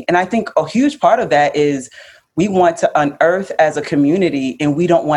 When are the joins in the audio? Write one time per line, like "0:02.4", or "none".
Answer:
none

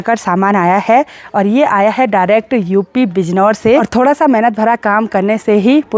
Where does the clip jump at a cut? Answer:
0:03.9

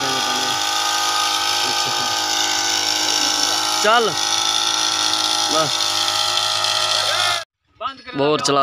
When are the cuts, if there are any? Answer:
0:07.5

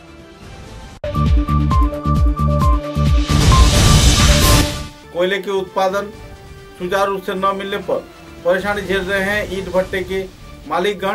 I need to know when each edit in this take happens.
0:00.9
0:04.6

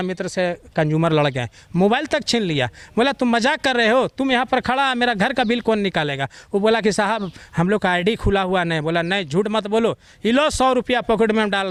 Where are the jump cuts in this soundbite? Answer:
none

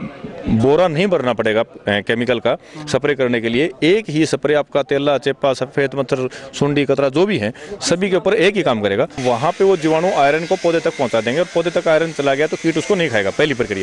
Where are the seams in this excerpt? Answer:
0:09.2

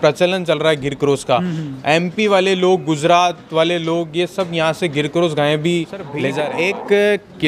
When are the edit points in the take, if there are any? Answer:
0:06.3

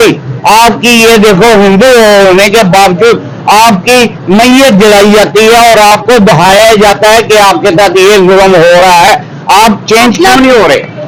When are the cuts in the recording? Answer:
none

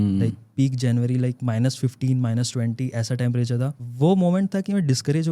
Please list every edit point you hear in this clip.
0:03.8

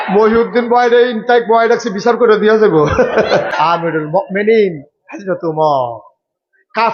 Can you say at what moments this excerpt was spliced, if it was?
0:03.5

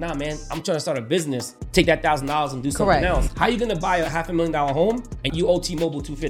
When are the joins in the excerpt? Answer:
0:01.5
0:03.3
0:05.3

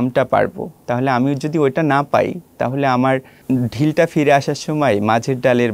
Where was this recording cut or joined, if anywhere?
0:03.3

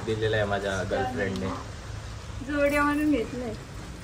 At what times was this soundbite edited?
none

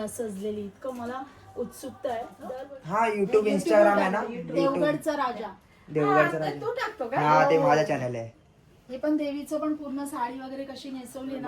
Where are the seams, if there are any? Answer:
0:02.5

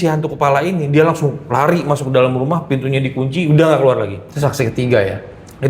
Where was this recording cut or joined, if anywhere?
0:04.2

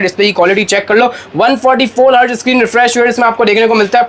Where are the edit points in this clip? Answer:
none

